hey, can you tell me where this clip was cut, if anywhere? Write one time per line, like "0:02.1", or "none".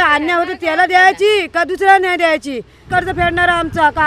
0:02.9